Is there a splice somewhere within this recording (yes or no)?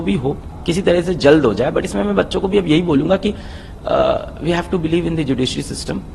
no